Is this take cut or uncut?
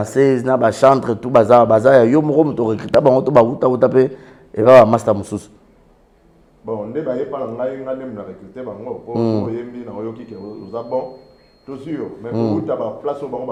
uncut